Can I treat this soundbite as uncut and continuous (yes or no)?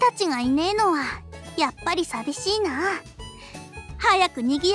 yes